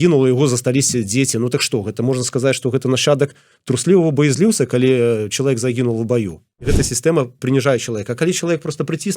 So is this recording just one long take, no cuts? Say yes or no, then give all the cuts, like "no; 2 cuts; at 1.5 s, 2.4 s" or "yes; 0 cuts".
no; 1 cut; at 6.7 s